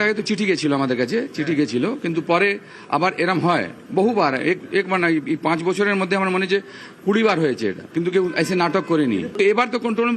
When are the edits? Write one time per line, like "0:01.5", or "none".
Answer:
none